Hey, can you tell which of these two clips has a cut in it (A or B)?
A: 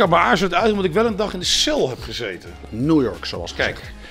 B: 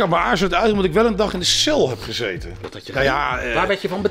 A